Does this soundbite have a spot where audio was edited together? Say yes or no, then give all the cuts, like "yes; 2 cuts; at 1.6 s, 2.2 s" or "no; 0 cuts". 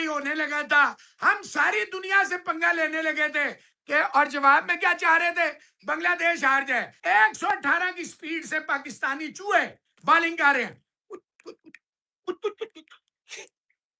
yes; 1 cut; at 6.9 s